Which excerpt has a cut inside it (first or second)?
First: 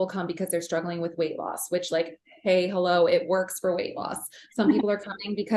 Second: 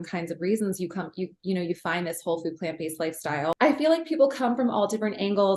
second